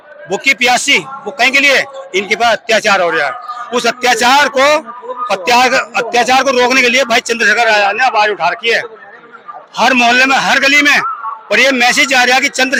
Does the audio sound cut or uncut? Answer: uncut